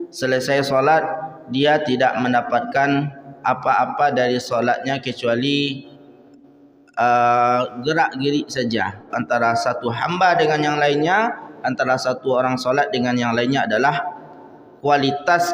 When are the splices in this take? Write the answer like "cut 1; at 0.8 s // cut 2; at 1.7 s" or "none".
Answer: cut 1; at 9.1 s